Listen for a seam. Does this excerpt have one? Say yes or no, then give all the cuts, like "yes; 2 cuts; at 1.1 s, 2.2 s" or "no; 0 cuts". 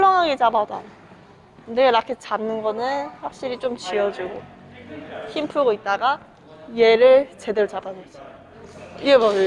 no; 0 cuts